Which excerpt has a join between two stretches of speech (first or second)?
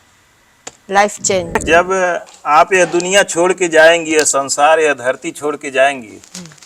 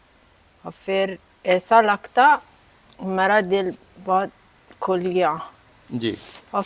first